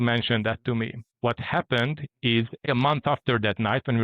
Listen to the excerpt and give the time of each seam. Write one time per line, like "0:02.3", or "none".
0:01.1
0:02.7